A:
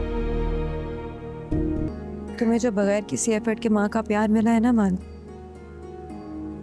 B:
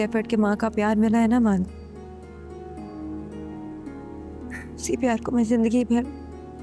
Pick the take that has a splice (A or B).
A